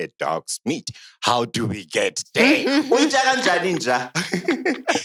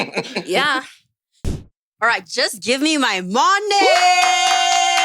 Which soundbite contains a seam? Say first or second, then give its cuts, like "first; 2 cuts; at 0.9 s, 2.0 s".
second; 1 cut; at 1.4 s